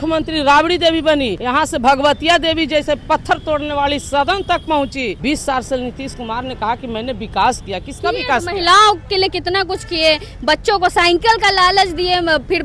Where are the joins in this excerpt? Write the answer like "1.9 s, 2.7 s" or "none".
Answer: 1.4 s, 5.2 s